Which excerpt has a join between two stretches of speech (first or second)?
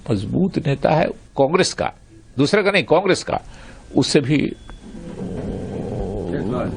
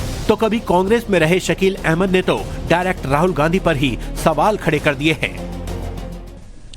second